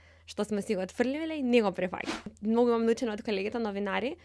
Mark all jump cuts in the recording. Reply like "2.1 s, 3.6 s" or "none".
2.3 s

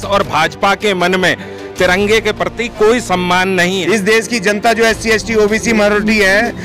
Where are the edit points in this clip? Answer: 3.8 s

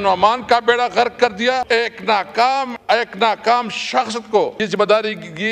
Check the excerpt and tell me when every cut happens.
1.7 s, 2.7 s, 4.6 s

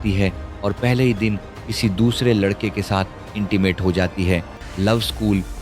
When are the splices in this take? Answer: 4.6 s

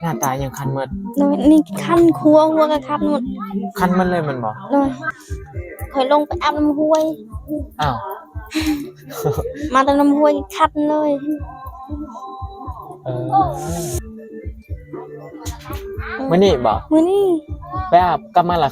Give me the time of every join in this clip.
5.1 s, 14.0 s

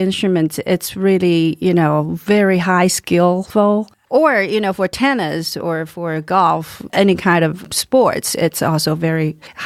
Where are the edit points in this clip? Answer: none

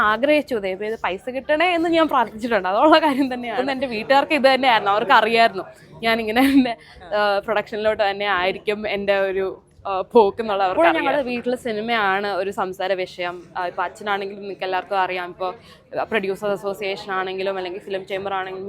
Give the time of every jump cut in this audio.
3.6 s, 10.7 s

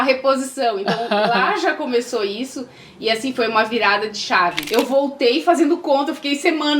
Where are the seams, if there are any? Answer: 4.6 s

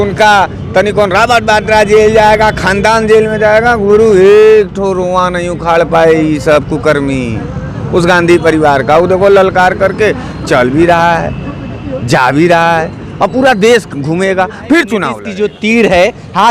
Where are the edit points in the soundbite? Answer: 15.2 s

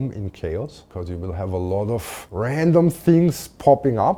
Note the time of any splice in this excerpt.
none

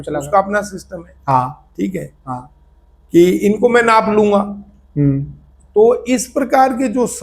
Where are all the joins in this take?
none

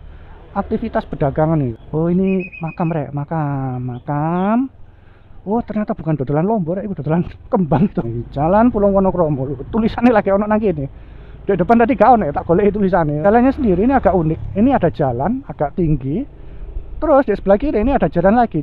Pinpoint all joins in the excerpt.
1.8 s, 8.1 s, 13.2 s

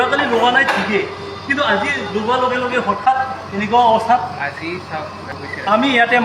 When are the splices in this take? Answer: 5.2 s

